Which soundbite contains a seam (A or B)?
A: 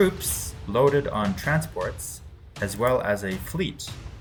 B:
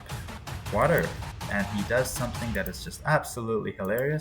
B